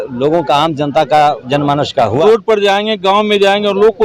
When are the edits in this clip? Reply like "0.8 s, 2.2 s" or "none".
2.2 s

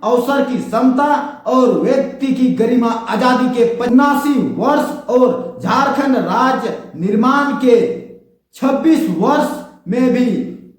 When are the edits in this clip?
3.9 s

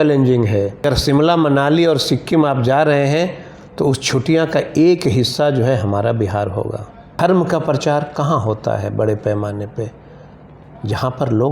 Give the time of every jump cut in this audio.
0.8 s, 7.1 s

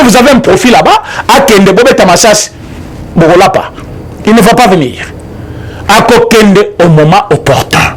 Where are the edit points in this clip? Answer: none

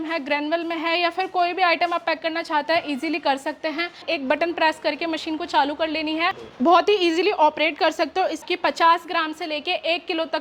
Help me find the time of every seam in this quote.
4.1 s, 8.4 s

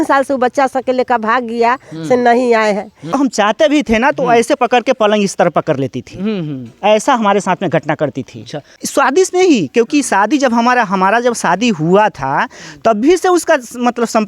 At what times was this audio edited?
3.1 s, 8.8 s

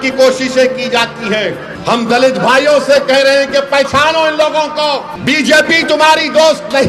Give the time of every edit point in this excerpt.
1.7 s, 5.1 s

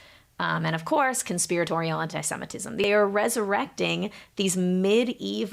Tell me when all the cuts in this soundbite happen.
2.8 s

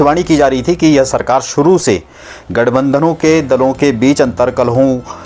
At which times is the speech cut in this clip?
none

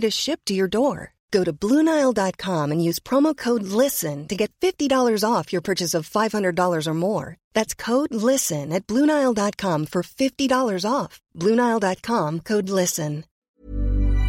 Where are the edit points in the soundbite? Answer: 13.3 s

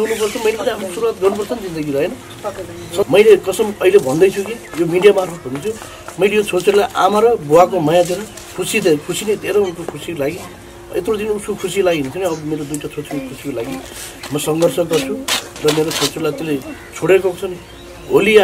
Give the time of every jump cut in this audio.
3.1 s

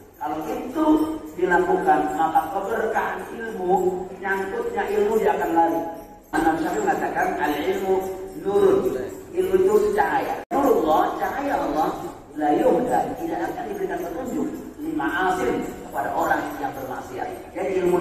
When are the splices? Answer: 6.3 s, 10.4 s

